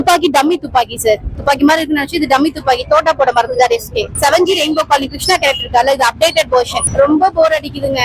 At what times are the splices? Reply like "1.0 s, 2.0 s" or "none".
1.3 s, 4.0 s, 6.8 s